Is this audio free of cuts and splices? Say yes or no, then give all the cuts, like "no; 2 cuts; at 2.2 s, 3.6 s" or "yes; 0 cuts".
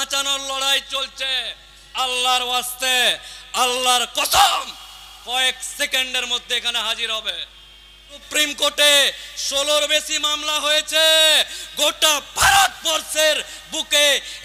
no; 1 cut; at 8.3 s